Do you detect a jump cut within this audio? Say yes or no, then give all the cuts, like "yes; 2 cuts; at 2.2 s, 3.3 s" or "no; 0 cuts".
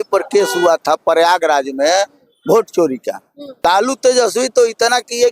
yes; 1 cut; at 3.6 s